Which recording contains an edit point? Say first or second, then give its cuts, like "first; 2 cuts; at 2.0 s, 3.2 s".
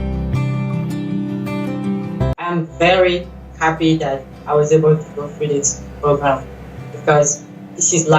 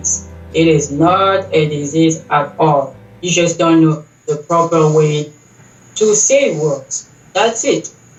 first; 1 cut; at 2.5 s